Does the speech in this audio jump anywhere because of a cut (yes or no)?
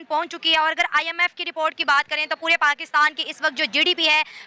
no